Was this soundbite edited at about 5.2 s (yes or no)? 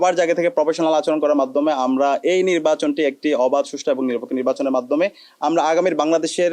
no